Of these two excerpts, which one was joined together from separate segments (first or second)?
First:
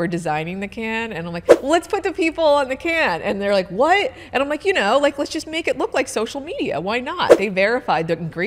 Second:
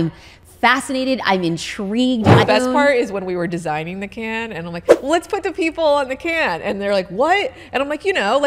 second